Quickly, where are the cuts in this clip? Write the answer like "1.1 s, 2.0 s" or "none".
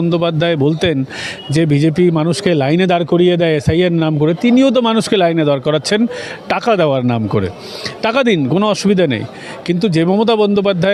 none

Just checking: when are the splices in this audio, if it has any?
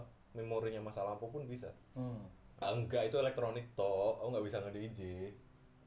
2.6 s

